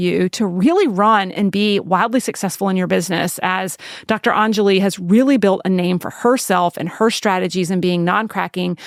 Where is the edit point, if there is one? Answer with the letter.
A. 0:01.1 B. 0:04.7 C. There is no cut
C